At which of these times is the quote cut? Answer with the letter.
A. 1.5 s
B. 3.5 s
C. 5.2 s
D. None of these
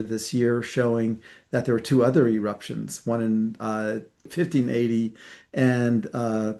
D